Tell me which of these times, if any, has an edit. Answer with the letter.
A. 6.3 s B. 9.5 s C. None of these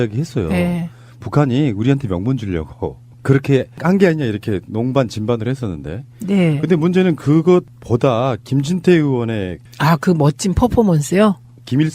B